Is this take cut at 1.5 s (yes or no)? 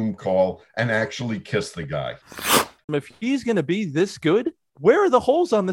no